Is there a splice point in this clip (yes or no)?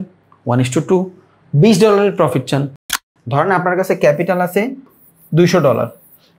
yes